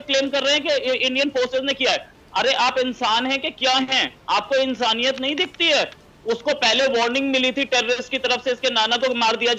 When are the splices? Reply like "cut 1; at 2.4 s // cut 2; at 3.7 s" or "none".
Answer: none